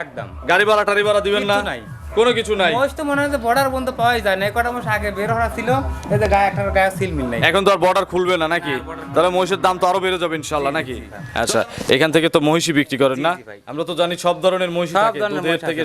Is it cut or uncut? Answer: cut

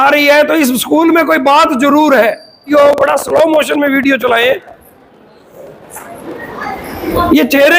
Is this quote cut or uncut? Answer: cut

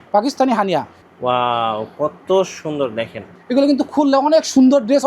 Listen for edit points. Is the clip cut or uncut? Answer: cut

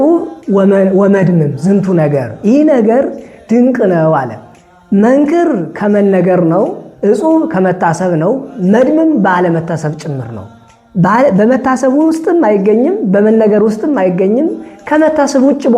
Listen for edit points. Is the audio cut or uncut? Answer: uncut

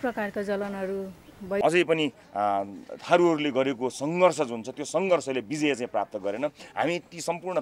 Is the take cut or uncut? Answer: cut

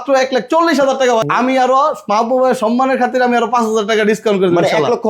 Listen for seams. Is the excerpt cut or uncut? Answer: cut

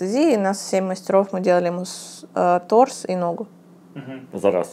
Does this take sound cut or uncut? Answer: uncut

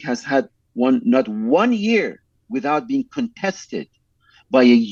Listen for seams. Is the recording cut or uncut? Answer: uncut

